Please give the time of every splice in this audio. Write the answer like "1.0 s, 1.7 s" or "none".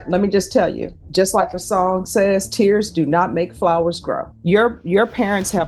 0.9 s, 4.3 s

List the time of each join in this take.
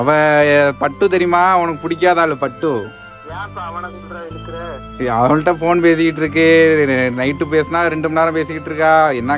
3.1 s

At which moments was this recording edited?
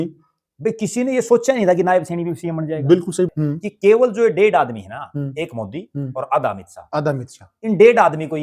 3.3 s

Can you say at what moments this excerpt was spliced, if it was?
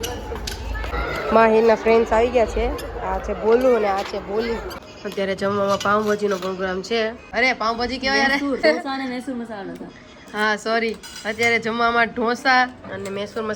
0.9 s, 4.8 s, 7.2 s, 8.6 s

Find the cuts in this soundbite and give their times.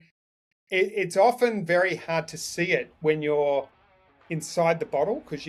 none

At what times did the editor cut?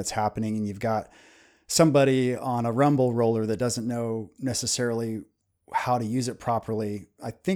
none

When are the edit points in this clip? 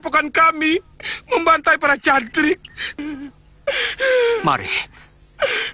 2.9 s

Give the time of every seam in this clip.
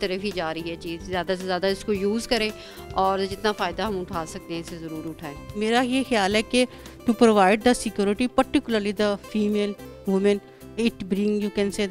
5.5 s

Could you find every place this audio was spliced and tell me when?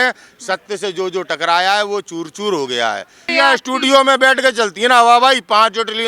3.2 s

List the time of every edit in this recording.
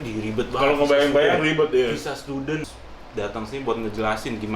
2.7 s

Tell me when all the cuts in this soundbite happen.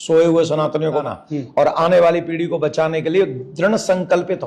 1.0 s

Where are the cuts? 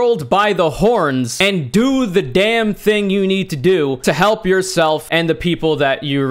4.0 s, 5.0 s

